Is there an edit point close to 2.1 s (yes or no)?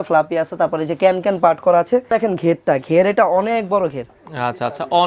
yes